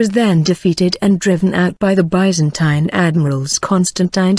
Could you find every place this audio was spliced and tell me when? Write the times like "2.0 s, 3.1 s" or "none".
0.9 s